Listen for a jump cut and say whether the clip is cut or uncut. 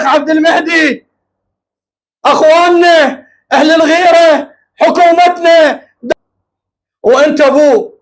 cut